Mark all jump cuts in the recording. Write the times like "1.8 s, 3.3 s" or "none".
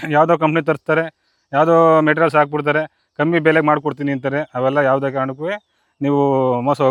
none